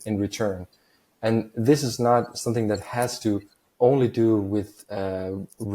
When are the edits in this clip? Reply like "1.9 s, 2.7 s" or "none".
3.6 s